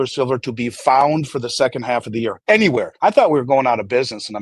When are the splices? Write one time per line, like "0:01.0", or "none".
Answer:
0:02.4
0:02.9